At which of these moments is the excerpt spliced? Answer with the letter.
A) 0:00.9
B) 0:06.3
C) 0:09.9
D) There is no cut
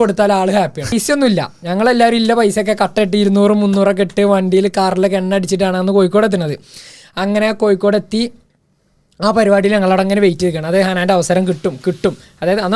A